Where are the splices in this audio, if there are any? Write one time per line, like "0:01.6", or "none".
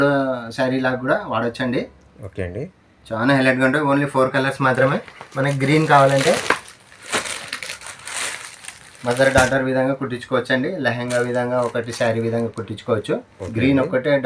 none